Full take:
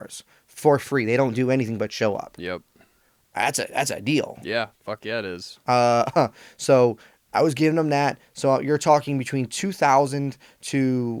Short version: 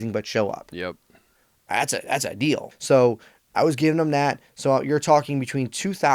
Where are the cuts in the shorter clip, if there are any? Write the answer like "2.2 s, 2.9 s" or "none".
2.7 s